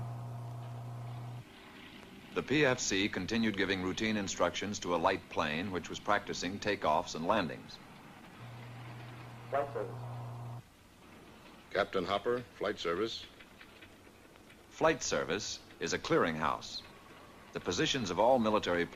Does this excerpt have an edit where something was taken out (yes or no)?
no